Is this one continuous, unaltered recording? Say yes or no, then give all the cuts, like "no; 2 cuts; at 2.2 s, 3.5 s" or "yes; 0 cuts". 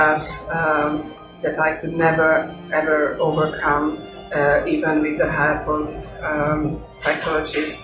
yes; 0 cuts